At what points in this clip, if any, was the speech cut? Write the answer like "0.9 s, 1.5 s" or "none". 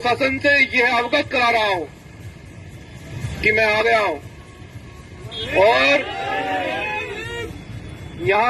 none